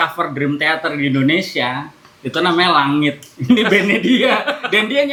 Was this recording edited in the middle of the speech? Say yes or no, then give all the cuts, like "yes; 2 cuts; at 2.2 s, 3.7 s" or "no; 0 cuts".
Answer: no; 0 cuts